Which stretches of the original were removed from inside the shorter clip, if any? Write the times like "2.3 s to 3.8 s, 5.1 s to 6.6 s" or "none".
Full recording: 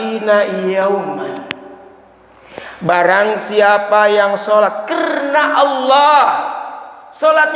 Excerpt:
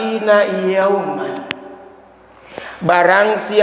none

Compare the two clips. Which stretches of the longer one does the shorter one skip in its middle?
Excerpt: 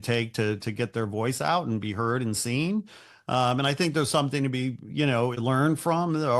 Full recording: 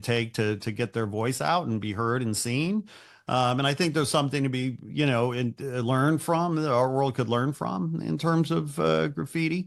5.3 s to 5.8 s

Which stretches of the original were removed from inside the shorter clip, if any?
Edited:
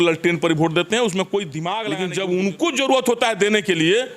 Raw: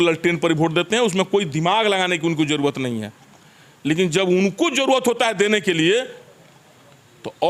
1.8 s to 3.8 s

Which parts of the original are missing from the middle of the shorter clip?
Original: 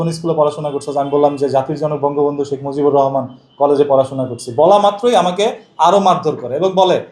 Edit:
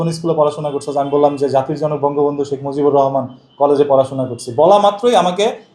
none

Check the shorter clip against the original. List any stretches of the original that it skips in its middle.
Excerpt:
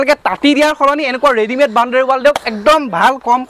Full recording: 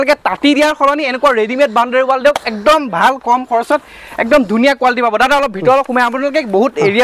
none

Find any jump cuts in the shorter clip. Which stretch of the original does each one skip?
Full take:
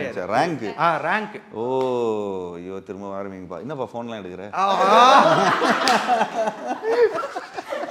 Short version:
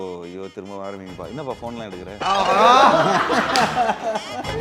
none

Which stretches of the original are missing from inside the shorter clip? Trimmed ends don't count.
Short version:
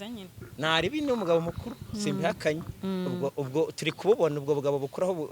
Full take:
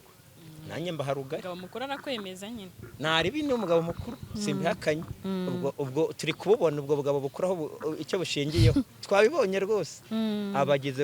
none

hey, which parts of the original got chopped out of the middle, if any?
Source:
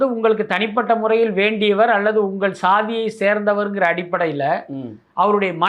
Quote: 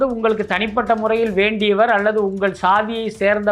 none

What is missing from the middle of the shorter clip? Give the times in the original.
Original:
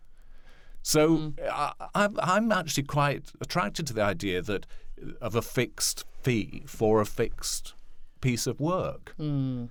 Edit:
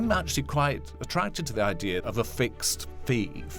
4.4 s to 5.2 s

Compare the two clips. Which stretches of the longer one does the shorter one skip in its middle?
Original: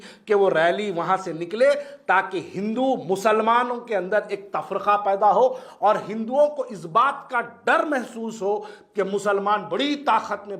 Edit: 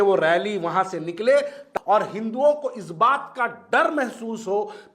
2.0 s to 5.6 s

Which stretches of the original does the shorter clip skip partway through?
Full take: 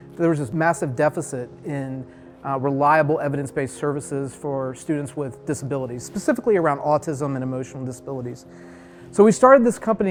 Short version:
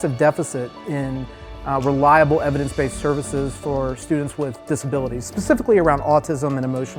none

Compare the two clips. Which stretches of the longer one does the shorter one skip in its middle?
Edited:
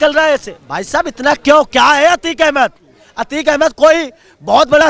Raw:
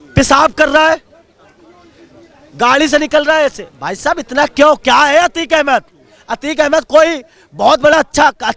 none

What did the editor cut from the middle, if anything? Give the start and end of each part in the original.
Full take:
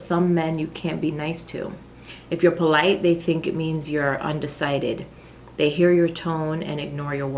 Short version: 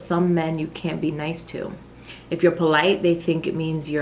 none

